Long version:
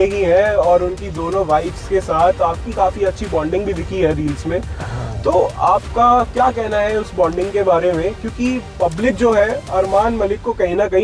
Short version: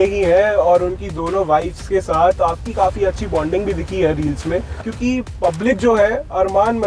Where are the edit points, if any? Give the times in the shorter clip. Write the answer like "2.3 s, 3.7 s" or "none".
4.9 s